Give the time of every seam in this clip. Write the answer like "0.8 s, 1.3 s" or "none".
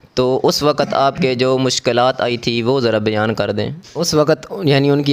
3.8 s